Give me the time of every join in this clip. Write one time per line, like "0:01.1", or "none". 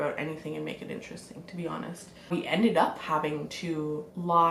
0:02.3